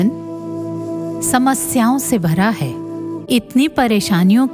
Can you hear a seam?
yes; 1 cut; at 3.2 s

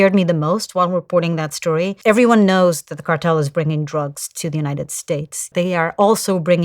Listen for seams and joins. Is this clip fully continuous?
no; 2 cuts; at 2.0 s, 5.4 s

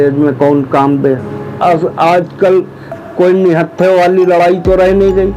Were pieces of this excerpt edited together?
yes; 1 cut; at 1.6 s

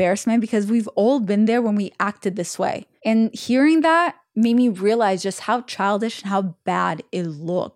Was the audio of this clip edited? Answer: yes; 1 cut; at 2.9 s

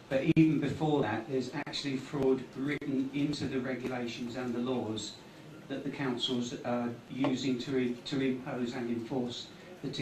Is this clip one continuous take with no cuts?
no; 1 cut; at 3.9 s

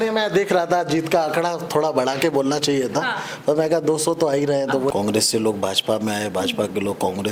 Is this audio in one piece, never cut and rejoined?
no; 1 cut; at 4.9 s

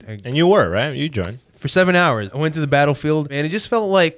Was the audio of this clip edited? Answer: yes; 2 cuts; at 2.3 s, 3.3 s

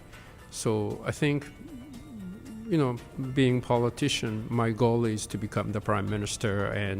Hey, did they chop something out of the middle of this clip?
yes; 1 cut; at 3.1 s

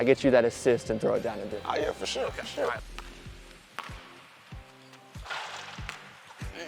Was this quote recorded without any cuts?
no; 1 cut; at 2.8 s

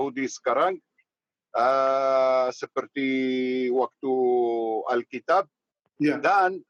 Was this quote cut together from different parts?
no; 0 cuts

